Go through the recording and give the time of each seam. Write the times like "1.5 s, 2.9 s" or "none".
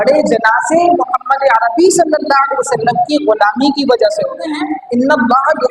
4.7 s